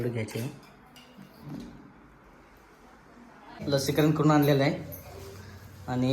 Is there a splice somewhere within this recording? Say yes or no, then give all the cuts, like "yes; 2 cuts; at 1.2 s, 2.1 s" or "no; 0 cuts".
yes; 1 cut; at 3.6 s